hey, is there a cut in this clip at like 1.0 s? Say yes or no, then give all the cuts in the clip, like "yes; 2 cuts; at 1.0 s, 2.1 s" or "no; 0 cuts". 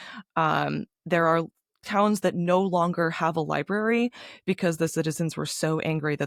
no; 0 cuts